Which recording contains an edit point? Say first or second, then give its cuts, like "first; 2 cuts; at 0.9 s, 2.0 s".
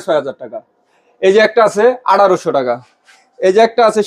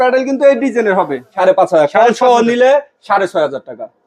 second; 1 cut; at 1.3 s